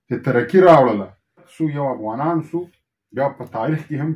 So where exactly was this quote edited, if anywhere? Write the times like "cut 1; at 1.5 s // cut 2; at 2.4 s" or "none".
cut 1; at 1.5 s